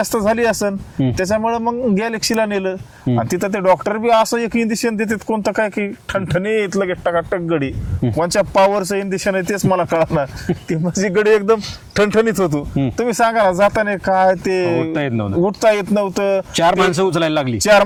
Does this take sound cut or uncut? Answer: uncut